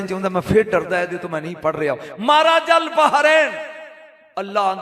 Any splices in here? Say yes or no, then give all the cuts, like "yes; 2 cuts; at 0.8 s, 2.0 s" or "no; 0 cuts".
no; 0 cuts